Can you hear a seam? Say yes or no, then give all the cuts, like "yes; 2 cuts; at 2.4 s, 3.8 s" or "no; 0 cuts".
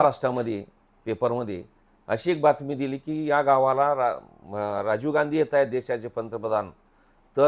no; 0 cuts